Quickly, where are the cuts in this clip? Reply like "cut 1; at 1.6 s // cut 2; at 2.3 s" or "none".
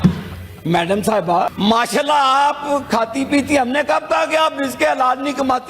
cut 1; at 1.5 s